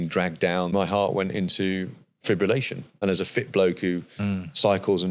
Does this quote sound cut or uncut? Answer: cut